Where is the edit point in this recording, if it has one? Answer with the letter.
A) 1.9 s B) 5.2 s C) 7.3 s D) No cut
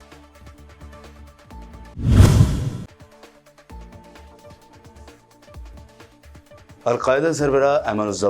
D